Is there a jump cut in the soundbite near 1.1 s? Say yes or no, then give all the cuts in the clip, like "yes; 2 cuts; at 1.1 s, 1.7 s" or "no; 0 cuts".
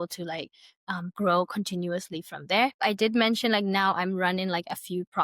no; 1 cut; at 2.8 s